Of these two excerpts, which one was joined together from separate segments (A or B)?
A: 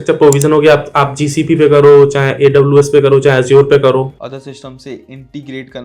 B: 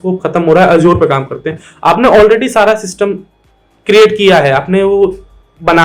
A